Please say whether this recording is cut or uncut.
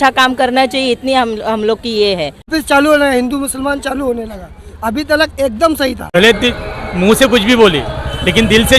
cut